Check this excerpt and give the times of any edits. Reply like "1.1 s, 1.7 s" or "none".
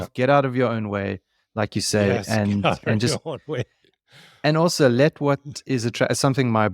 none